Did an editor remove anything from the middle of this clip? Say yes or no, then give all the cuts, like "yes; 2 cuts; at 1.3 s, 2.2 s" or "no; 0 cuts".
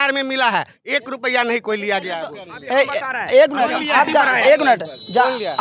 no; 0 cuts